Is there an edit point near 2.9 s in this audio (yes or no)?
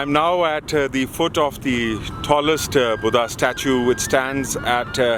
no